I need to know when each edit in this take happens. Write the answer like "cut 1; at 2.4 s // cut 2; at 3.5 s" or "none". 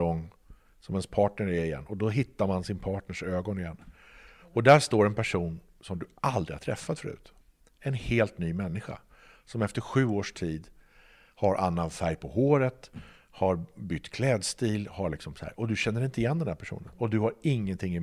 cut 1; at 7.3 s